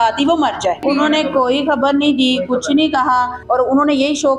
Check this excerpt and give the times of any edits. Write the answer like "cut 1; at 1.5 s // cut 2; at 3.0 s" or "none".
cut 1; at 0.8 s // cut 2; at 3.4 s